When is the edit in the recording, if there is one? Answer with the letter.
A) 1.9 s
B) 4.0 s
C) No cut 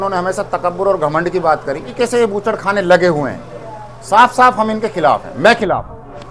A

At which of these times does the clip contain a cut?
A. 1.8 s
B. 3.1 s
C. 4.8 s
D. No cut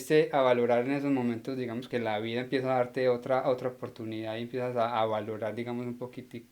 A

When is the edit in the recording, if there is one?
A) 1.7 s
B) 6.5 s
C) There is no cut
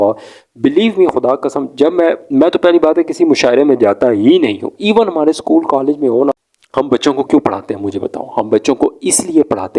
B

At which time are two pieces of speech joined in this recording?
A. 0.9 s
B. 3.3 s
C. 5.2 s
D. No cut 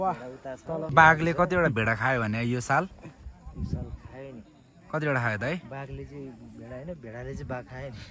A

